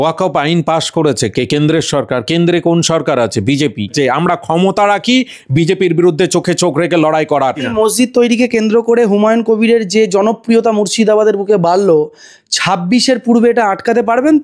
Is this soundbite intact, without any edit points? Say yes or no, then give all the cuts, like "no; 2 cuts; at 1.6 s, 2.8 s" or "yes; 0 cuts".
no; 2 cuts; at 3.9 s, 7.6 s